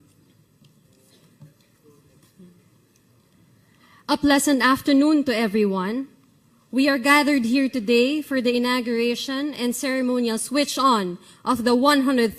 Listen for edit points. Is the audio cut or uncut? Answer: uncut